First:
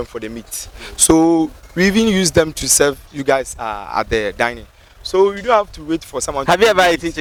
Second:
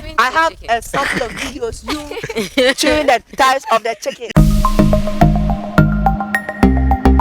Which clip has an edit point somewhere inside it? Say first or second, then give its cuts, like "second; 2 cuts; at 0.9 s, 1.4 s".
second; 1 cut; at 4.3 s